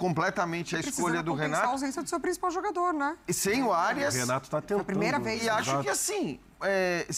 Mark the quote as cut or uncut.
uncut